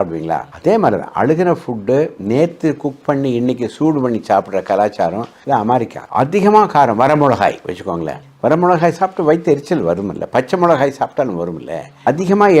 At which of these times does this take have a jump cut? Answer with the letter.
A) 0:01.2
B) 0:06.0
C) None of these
B